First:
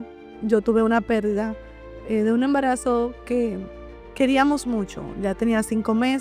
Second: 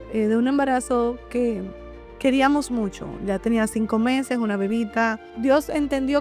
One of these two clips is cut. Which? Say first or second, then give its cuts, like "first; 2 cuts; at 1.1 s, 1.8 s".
second; 1 cut; at 5.3 s